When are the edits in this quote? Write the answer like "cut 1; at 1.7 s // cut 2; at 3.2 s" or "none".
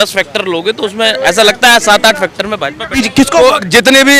none